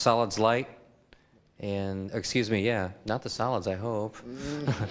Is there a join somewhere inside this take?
yes; 1 cut; at 2.5 s

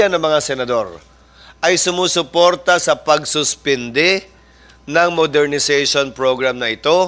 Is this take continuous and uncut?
yes; 0 cuts

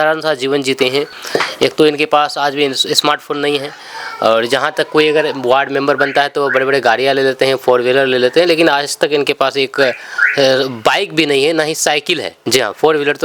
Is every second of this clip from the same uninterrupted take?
no; 1 cut; at 12.3 s

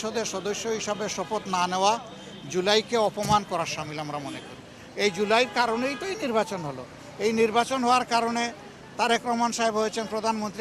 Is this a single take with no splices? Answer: yes; 0 cuts

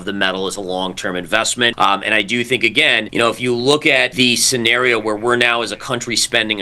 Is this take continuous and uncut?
no; 3 cuts; at 1.7 s, 3.0 s, 4.1 s

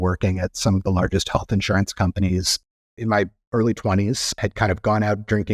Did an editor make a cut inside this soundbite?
yes; 2 cuts; at 2.5 s, 4.4 s

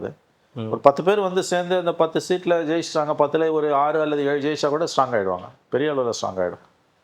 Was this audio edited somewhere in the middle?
no; 0 cuts

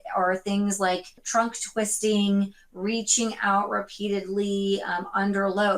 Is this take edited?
yes; 1 cut; at 1.2 s

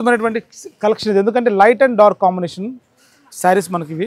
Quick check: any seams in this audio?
no; 0 cuts

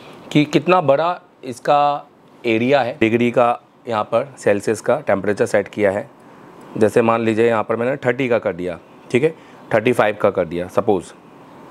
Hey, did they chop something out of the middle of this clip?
yes; 1 cut; at 2.9 s

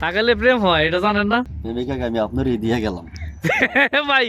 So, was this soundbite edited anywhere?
yes; 1 cut; at 1.6 s

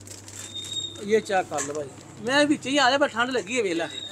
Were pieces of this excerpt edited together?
no; 0 cuts

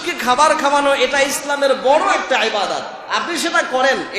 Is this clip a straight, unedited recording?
yes; 0 cuts

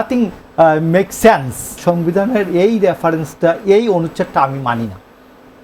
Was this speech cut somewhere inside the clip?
yes; 1 cut; at 1.8 s

